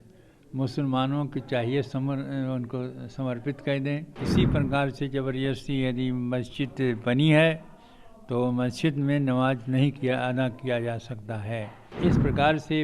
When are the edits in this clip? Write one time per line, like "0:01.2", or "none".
0:04.2
0:11.8

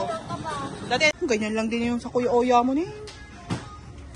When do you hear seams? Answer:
0:01.1

